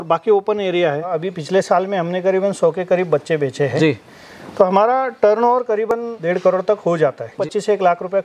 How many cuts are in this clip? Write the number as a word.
three